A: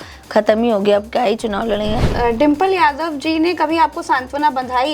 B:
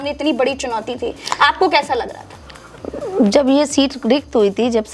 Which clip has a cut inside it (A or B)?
A